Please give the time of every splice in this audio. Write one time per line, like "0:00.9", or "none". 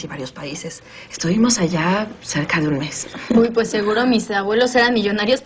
none